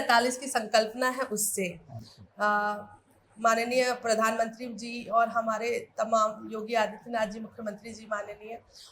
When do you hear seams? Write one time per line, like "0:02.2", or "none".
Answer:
none